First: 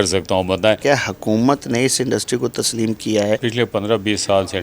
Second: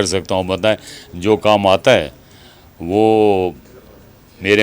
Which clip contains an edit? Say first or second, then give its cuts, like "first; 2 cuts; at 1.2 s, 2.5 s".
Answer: first; 2 cuts; at 0.8 s, 3.4 s